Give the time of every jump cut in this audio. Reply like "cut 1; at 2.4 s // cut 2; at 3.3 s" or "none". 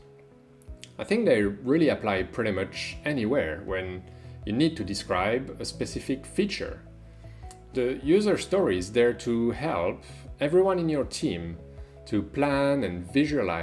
cut 1; at 7.7 s